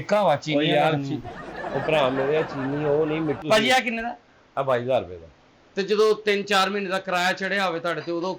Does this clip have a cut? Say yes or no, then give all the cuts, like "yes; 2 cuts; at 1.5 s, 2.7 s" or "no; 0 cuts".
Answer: yes; 1 cut; at 3.4 s